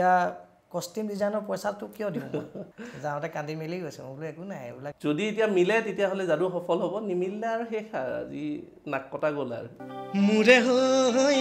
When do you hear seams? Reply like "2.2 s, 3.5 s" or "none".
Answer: 2.6 s, 4.9 s, 9.7 s